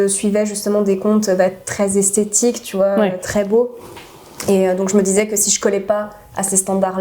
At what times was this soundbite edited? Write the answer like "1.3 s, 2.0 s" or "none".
none